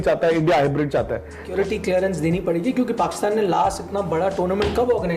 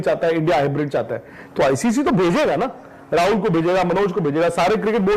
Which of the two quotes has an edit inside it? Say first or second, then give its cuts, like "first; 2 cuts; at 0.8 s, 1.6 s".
first; 1 cut; at 1.4 s